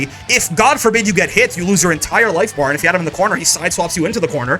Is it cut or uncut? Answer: uncut